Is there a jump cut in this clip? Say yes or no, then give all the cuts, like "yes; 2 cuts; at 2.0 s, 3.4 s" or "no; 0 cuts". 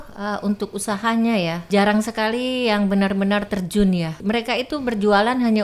yes; 2 cuts; at 1.7 s, 4.1 s